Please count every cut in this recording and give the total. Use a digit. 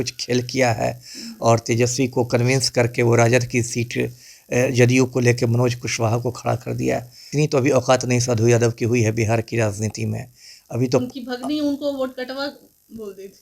1